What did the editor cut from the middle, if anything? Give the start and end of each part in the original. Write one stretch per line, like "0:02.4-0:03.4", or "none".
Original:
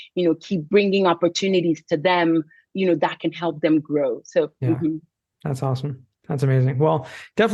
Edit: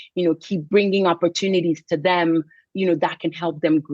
none